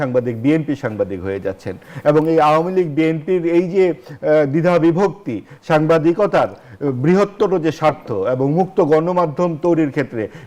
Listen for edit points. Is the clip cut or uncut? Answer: uncut